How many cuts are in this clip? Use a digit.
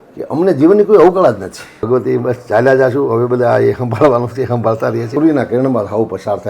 2